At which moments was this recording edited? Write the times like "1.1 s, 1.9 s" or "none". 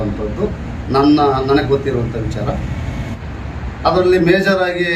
3.1 s